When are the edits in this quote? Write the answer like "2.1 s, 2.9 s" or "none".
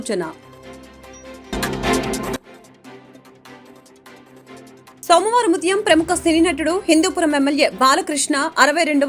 1.5 s, 5.0 s